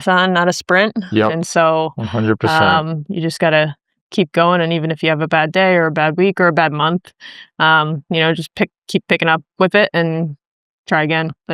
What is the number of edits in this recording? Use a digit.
0